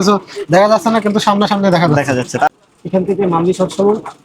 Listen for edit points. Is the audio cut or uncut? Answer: cut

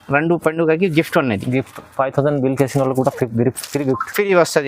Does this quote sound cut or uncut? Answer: uncut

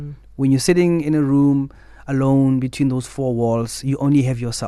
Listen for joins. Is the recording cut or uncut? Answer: uncut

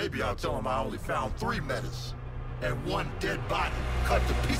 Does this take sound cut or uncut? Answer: uncut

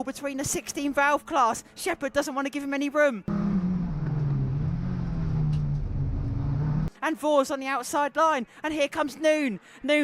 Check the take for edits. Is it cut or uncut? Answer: cut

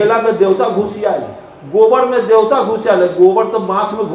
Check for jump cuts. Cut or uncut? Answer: uncut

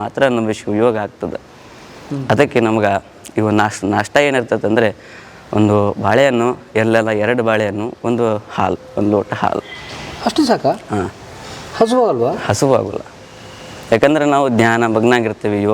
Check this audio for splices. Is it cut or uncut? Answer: uncut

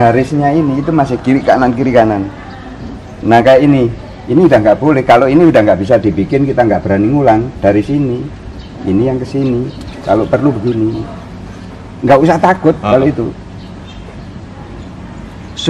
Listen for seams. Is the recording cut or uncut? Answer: uncut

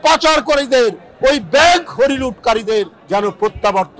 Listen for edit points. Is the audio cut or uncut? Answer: cut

